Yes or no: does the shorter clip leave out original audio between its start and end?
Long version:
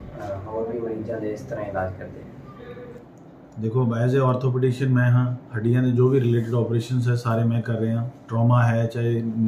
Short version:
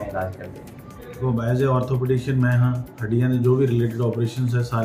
yes